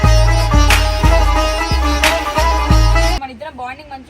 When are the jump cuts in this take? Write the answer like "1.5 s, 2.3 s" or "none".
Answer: 3.2 s